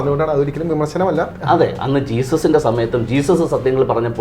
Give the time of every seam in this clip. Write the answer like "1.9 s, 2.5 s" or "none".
1.4 s